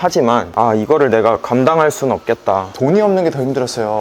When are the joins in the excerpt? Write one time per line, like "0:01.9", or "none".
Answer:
0:02.7